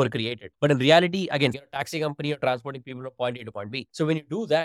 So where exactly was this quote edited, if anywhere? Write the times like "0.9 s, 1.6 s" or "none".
1.5 s